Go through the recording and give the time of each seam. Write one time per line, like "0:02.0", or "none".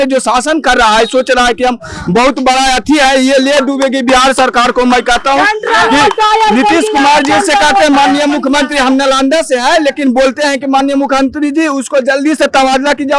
none